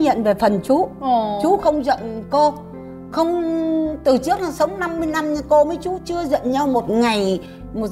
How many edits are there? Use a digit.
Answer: 0